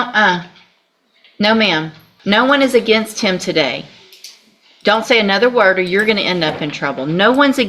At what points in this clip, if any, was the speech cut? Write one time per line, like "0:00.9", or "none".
0:02.0